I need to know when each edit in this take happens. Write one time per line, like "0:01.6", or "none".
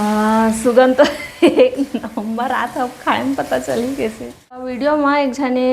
0:04.7